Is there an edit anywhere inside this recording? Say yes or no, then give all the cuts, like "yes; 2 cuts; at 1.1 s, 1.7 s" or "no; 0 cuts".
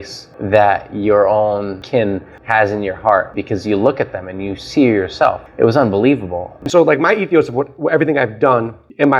yes; 3 cuts; at 2.3 s, 5.4 s, 6.6 s